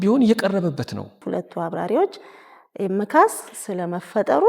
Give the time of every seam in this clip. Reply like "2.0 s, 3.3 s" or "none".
1.2 s